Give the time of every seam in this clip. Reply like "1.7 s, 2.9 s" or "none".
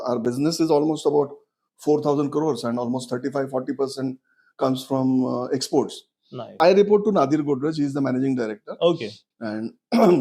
6.4 s